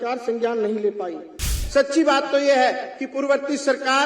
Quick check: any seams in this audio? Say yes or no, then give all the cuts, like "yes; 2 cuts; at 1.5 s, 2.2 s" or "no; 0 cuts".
yes; 1 cut; at 1.5 s